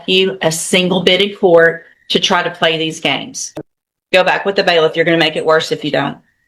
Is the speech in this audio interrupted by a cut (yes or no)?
yes